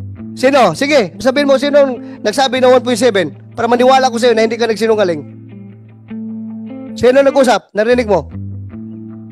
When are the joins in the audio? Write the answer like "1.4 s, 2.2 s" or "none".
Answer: none

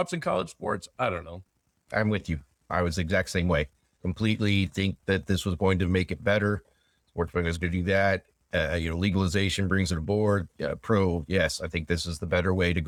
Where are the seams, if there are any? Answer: none

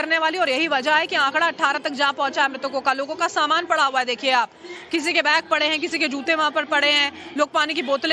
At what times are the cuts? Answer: none

